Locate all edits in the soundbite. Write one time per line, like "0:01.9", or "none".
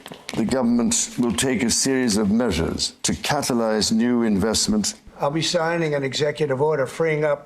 0:02.9
0:05.0